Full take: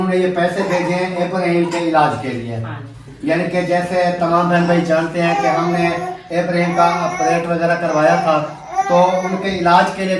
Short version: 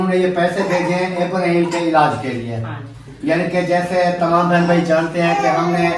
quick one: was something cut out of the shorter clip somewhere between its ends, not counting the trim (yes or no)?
no